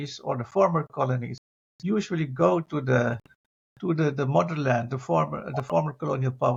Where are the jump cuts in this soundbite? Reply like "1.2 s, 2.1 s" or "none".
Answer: none